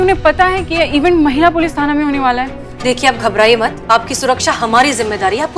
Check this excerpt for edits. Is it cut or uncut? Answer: cut